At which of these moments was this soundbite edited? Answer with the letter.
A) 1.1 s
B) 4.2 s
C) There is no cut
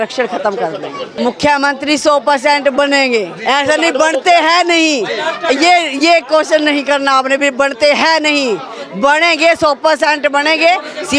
A